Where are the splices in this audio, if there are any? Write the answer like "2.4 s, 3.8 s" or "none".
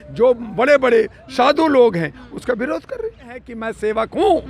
3.5 s